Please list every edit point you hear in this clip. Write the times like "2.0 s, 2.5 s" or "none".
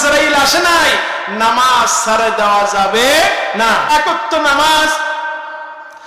3.9 s